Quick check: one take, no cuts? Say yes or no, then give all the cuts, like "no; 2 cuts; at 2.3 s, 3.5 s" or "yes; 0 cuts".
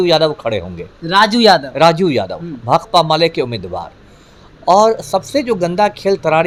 yes; 0 cuts